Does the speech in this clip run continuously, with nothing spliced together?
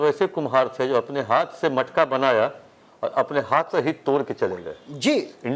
yes; 0 cuts

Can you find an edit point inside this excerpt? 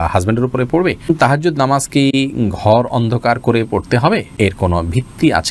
yes; 2 cuts; at 1.1 s, 4.3 s

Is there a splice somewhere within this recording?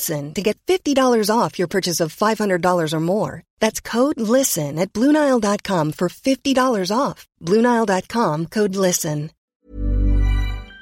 yes; 1 cut; at 9.4 s

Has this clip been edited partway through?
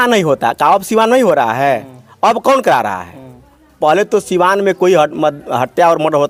no; 0 cuts

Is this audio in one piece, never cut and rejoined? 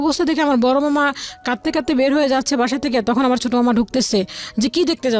yes; 0 cuts

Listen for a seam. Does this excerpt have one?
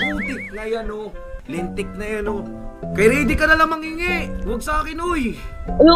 no; 0 cuts

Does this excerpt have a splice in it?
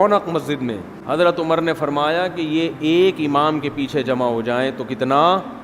yes; 1 cut; at 0.9 s

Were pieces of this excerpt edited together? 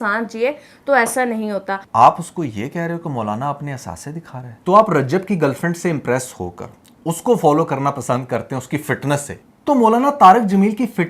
yes; 2 cuts; at 1.8 s, 4.5 s

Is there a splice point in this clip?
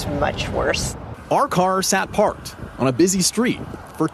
yes; 1 cut; at 1.1 s

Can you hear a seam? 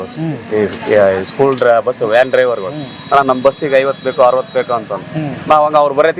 no; 0 cuts

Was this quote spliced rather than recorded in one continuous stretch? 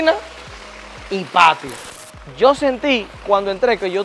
yes; 1 cut; at 1.8 s

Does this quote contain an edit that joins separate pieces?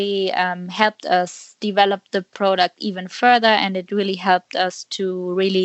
no; 0 cuts

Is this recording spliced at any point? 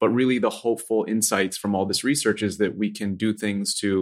no; 0 cuts

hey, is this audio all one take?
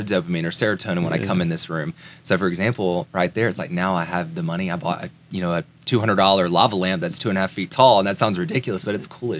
yes; 0 cuts

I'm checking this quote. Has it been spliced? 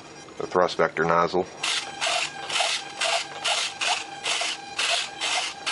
no; 0 cuts

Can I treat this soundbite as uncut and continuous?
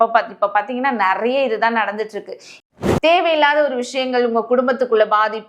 no; 1 cut; at 2.6 s

